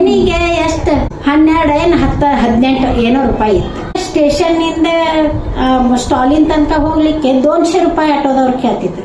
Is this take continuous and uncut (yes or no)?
no